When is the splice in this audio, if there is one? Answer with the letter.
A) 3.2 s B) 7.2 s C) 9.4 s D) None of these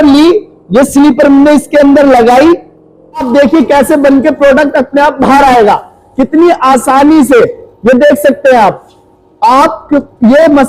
A